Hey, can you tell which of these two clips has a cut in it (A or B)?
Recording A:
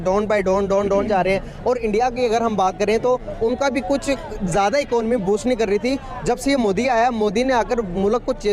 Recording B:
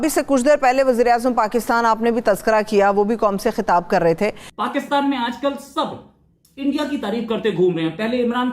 B